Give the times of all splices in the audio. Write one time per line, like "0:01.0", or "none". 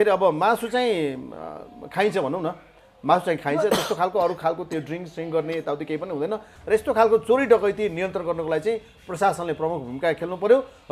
0:06.5